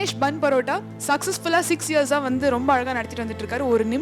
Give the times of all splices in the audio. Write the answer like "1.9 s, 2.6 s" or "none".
0.9 s